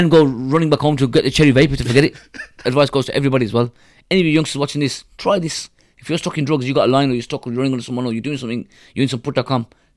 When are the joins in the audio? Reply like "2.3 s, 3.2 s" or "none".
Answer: 2.6 s